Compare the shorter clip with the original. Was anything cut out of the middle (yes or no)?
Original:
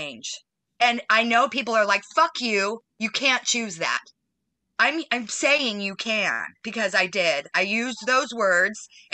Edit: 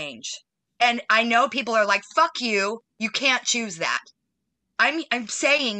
no